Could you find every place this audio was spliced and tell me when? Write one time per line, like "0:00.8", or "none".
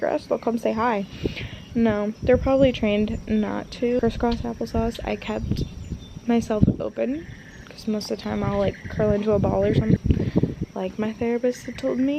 0:04.0
0:10.0

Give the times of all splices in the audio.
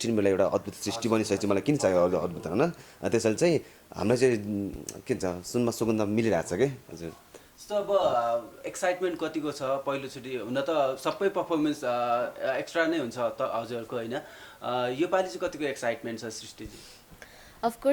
none

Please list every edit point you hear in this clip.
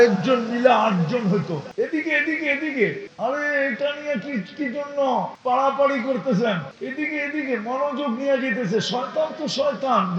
0:01.7
0:03.1
0:05.3
0:06.7

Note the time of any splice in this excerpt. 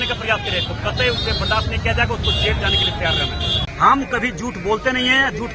0:03.6

